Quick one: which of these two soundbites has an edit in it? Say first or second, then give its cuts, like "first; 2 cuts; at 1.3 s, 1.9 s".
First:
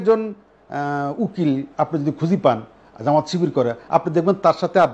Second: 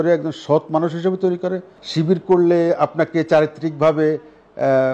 second; 1 cut; at 1.8 s